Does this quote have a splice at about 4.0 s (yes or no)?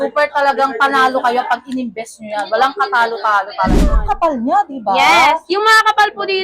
yes